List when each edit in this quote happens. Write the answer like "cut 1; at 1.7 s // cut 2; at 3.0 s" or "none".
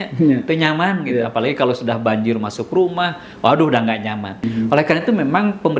cut 1; at 4.5 s